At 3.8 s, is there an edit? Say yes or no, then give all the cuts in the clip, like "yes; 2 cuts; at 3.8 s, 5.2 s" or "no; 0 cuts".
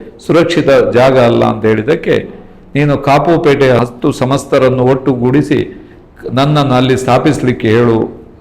yes; 1 cut; at 3.8 s